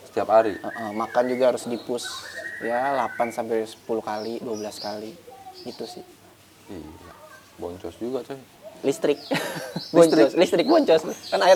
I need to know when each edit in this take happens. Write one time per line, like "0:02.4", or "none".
none